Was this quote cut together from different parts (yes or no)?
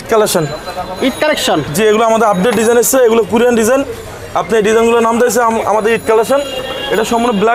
no